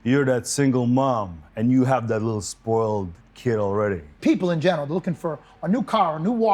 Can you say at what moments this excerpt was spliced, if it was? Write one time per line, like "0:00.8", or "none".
0:04.2